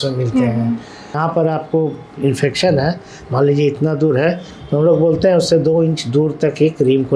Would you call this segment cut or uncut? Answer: cut